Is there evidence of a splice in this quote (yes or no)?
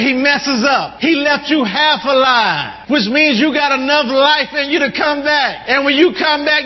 yes